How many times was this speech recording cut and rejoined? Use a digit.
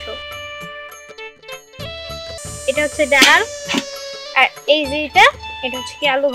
1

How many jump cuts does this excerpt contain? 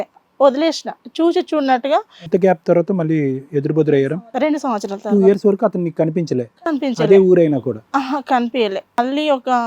2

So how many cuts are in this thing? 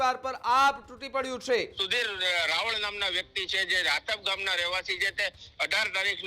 1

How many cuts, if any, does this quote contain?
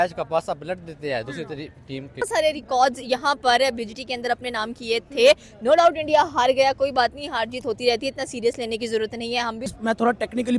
2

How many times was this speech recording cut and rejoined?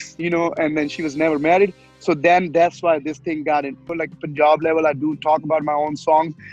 1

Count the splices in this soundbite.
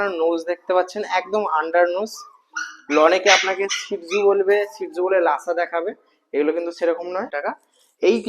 1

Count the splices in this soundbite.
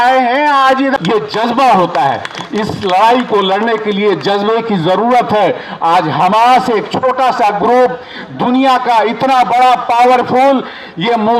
1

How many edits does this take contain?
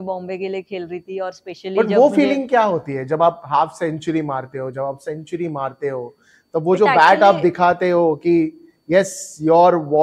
0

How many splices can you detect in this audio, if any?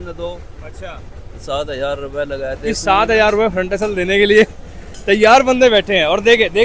1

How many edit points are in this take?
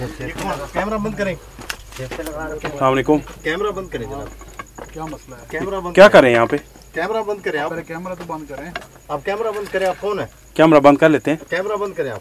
0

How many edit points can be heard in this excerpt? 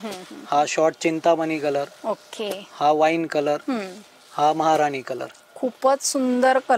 0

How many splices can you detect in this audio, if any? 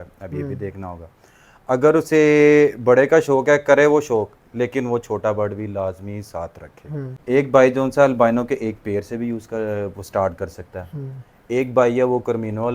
1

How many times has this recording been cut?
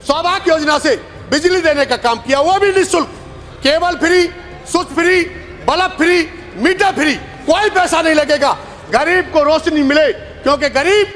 0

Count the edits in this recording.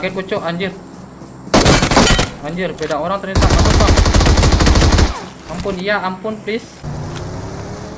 1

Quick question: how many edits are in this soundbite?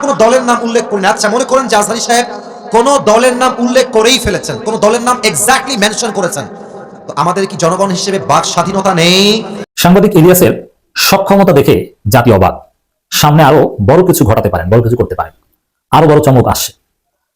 1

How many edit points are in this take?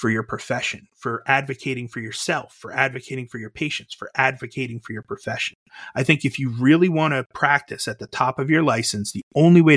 0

